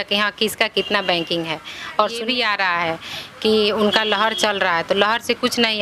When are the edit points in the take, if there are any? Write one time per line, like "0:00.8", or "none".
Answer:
0:02.2